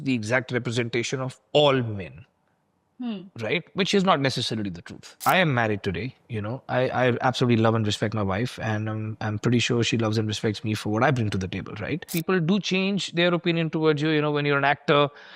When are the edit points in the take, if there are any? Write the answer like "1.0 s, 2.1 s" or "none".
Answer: 5.2 s, 12.1 s